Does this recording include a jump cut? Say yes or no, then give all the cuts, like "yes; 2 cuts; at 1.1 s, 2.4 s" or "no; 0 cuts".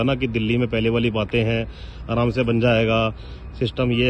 no; 0 cuts